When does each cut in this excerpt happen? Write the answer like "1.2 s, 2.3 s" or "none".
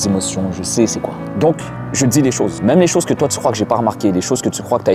1.2 s, 2.5 s